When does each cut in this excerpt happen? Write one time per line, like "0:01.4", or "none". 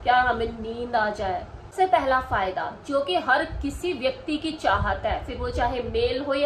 0:01.6

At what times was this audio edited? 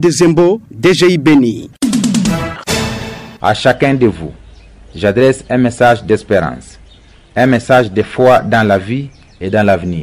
0:02.6

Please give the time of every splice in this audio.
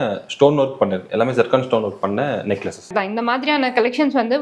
0:02.8

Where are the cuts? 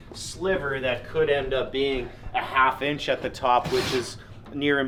none

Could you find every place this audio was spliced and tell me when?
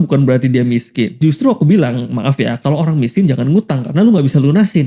none

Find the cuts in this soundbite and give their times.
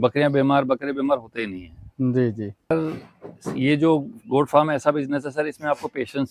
0:02.7

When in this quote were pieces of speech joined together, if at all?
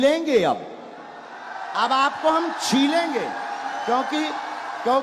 none

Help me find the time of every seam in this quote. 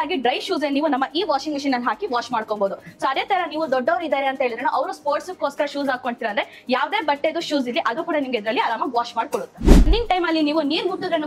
0:09.9

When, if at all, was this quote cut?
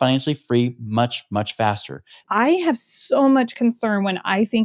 0:02.2

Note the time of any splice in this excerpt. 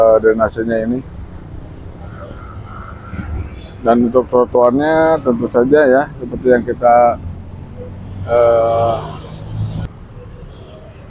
0:09.9

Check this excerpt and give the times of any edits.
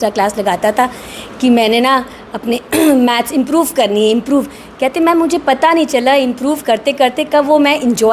none

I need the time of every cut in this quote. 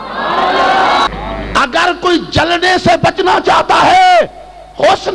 0:01.1

